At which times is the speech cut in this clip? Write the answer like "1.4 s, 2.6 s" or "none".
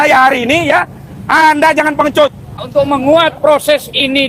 2.6 s